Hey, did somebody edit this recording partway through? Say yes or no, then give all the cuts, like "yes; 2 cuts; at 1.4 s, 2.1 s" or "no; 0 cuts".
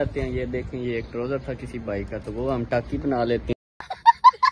no; 0 cuts